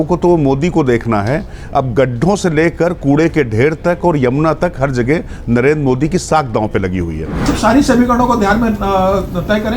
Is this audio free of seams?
no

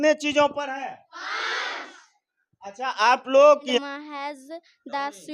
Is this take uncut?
no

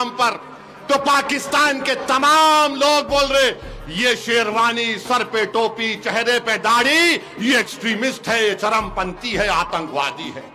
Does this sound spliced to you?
no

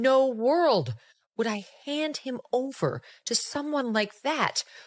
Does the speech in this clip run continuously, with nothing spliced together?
yes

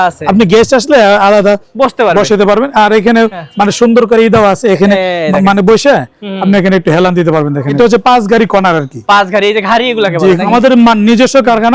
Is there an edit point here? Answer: yes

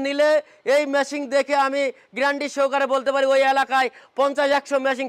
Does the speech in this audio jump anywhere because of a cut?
no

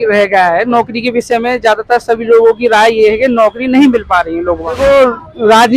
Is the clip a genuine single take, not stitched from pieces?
no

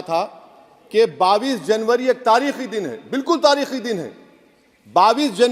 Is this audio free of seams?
yes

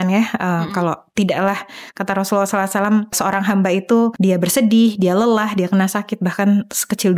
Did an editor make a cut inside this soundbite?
yes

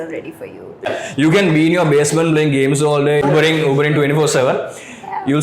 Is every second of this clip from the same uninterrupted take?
no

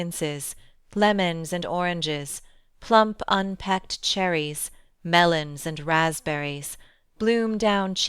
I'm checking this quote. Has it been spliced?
yes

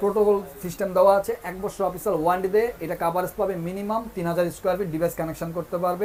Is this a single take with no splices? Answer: yes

